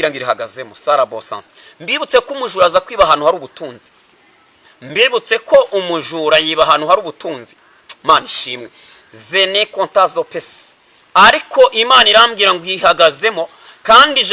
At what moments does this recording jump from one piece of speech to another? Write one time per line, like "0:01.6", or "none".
none